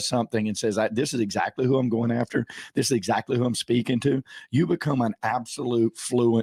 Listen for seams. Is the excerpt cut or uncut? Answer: uncut